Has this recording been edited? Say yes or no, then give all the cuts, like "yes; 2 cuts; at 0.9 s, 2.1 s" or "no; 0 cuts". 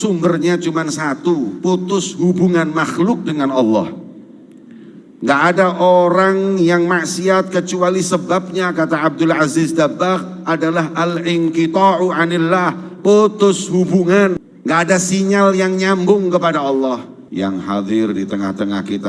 yes; 2 cuts; at 14.4 s, 17.2 s